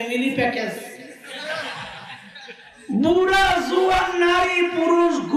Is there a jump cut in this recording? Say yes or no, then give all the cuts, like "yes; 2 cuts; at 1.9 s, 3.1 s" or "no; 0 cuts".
yes; 1 cut; at 2.6 s